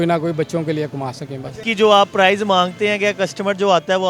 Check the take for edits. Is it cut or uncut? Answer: cut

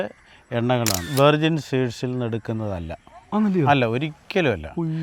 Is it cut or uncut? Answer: cut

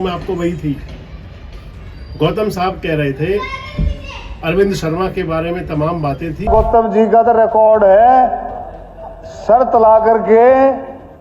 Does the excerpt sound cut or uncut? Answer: cut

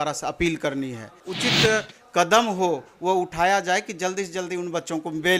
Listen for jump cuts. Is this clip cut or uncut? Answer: cut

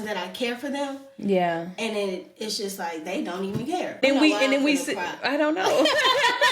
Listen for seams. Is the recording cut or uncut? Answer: cut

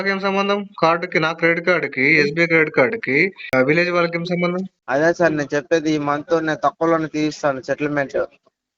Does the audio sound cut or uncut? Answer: cut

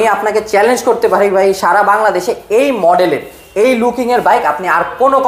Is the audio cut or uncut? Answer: uncut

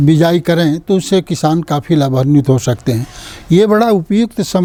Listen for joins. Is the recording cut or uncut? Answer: uncut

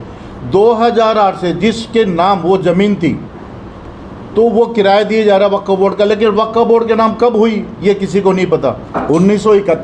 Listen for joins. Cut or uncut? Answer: cut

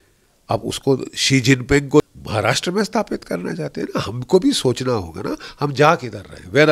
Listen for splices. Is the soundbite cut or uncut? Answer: cut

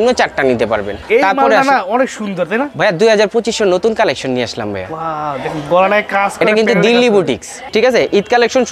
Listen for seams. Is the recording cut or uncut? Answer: cut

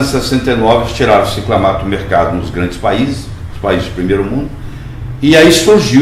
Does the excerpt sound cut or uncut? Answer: uncut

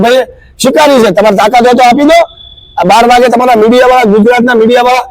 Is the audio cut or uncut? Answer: uncut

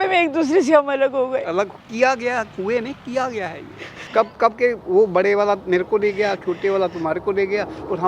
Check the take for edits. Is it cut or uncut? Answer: cut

